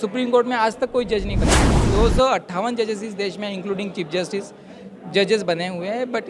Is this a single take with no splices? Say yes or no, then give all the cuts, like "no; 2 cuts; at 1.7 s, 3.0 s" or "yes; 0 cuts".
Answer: no; 1 cut; at 1.8 s